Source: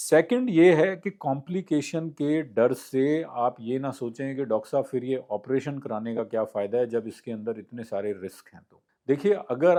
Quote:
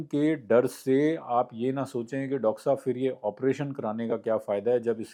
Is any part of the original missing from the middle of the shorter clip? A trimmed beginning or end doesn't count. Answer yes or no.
no